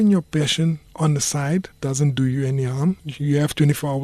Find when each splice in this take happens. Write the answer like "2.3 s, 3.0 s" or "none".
1.7 s, 3.1 s

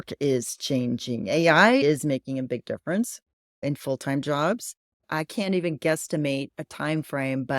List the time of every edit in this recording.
1.8 s

